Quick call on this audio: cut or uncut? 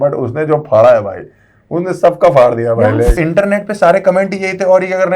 cut